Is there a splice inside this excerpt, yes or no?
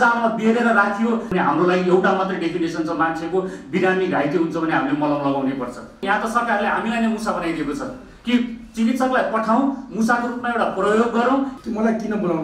yes